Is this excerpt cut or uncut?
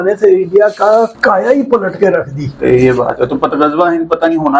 cut